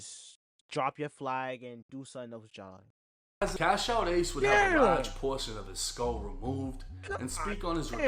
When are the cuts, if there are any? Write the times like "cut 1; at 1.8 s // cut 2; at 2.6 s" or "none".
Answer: cut 1; at 3.5 s